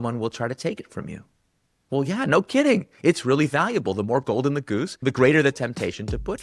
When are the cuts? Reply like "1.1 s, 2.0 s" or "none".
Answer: 5.0 s